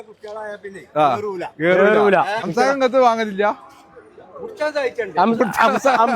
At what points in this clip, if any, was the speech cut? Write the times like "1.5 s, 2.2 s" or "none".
2.4 s

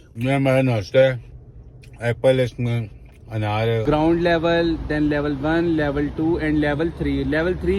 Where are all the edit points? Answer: 3.8 s

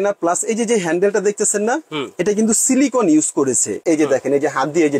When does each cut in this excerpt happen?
3.8 s

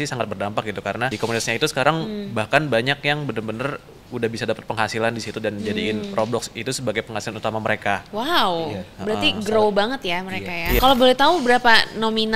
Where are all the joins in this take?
1.1 s, 10.8 s

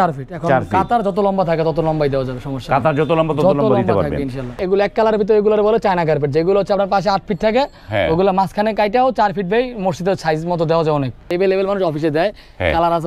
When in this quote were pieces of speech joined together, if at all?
4.6 s, 11.3 s

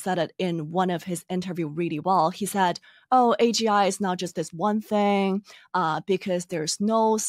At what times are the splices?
none

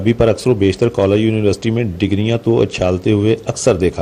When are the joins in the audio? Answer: none

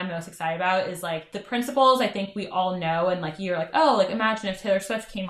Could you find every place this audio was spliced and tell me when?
1.3 s

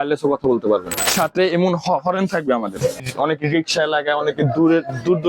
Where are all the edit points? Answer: 1.1 s, 3.0 s

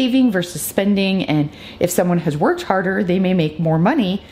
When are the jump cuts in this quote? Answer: none

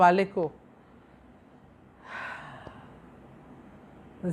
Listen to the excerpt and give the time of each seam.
none

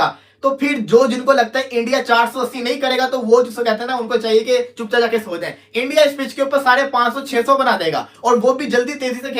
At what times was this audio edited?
none

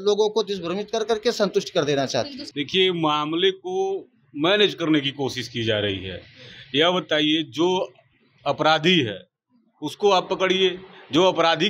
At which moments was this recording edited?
2.4 s

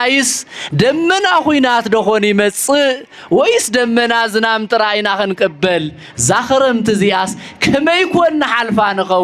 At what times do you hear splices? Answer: none

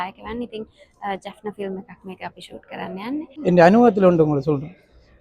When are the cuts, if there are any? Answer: 3.3 s

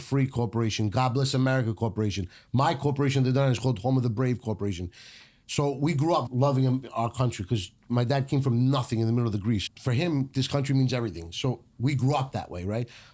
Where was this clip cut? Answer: 6.3 s, 9.6 s

